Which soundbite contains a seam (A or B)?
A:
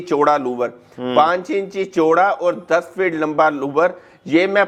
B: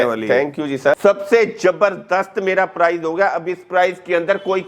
B